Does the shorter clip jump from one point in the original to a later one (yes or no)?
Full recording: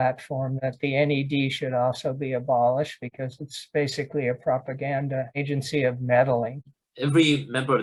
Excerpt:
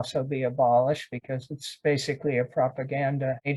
no